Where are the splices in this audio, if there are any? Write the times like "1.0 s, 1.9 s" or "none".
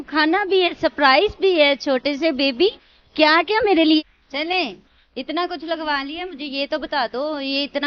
4.0 s